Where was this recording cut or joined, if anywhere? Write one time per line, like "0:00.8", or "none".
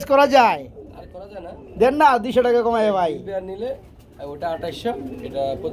none